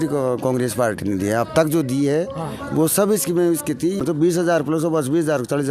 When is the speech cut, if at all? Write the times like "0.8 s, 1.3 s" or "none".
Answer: 4.0 s